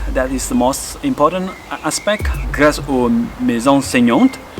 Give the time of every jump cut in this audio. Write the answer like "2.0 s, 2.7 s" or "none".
2.4 s